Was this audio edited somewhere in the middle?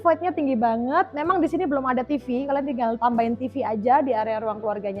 no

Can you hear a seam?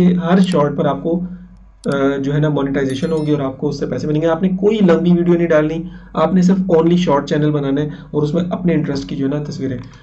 no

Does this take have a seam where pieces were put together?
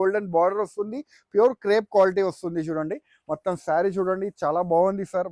no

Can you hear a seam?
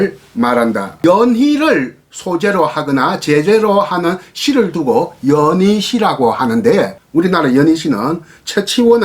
yes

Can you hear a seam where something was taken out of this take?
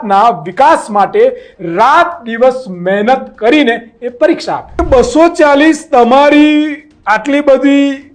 yes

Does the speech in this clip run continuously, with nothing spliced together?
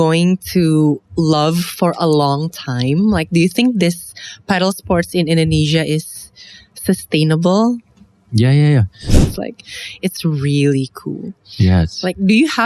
no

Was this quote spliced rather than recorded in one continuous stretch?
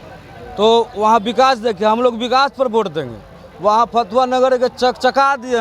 no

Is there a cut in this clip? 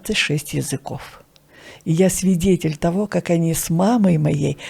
no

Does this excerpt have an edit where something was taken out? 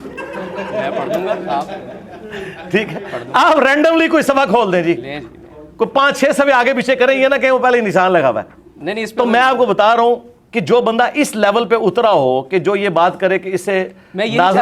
no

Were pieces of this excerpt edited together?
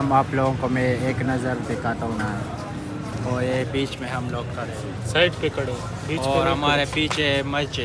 no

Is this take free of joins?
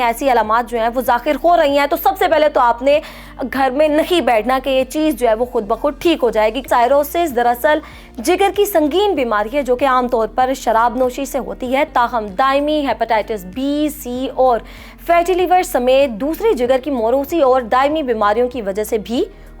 no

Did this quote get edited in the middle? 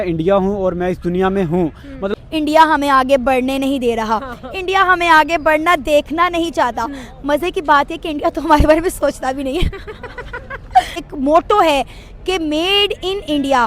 yes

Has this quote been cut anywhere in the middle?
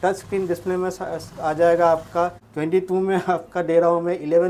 yes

